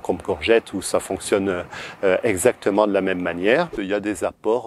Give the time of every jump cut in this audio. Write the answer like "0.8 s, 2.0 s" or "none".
3.8 s